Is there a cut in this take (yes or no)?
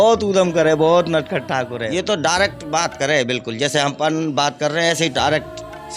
yes